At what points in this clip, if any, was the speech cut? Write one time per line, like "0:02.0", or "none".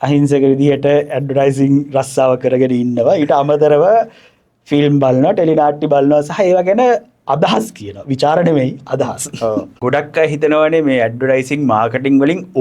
0:09.8